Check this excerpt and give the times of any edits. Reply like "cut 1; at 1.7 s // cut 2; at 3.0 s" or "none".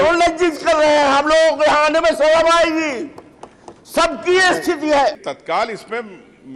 cut 1; at 5.3 s